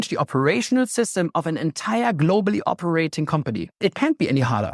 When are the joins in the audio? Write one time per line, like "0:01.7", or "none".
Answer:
0:03.8